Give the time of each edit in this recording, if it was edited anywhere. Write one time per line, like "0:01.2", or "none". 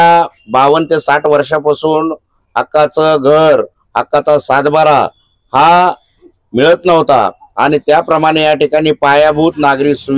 none